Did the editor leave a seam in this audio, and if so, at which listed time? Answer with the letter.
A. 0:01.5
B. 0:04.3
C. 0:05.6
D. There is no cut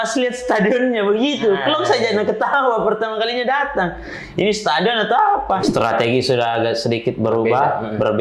C